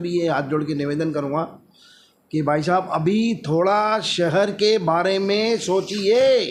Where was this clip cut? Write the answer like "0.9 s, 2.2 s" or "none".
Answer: none